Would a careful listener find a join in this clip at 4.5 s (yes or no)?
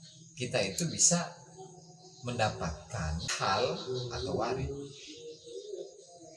no